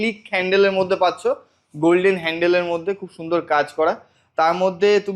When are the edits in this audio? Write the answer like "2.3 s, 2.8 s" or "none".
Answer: none